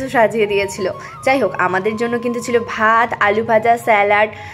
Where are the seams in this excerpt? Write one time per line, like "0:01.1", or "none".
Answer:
none